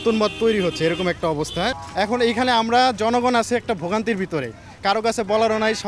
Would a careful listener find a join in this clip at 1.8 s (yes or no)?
yes